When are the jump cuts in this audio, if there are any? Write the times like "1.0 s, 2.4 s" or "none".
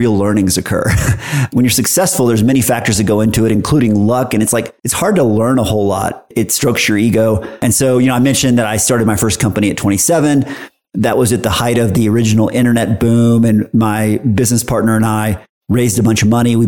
7.5 s